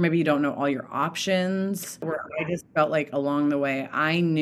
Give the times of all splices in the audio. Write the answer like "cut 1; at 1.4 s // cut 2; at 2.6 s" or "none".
cut 1; at 2.2 s

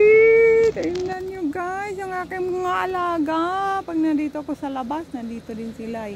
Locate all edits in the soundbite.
none

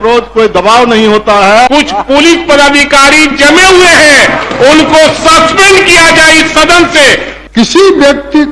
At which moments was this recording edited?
cut 1; at 1.7 s // cut 2; at 7.3 s

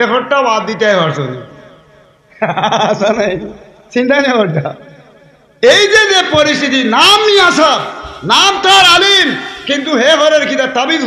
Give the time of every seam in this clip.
none

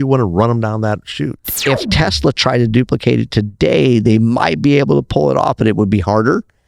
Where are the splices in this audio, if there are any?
cut 1; at 1.5 s

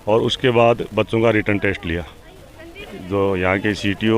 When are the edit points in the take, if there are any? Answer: cut 1; at 2.9 s

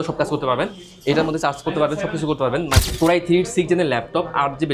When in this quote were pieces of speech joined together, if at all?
cut 1; at 2.8 s

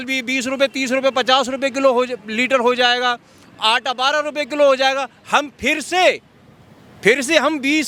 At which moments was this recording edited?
none

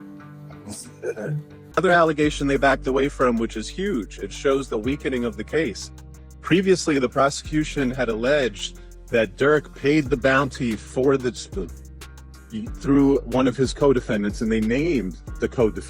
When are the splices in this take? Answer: cut 1; at 1.6 s

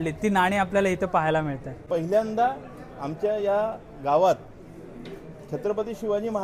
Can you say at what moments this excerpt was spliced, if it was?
cut 1; at 1.8 s

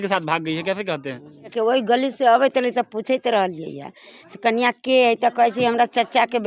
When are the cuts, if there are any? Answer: cut 1; at 1.5 s

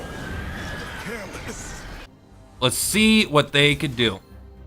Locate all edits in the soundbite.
cut 1; at 2.1 s

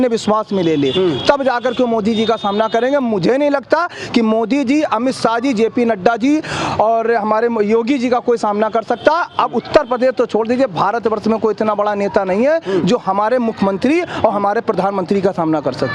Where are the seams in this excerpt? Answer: none

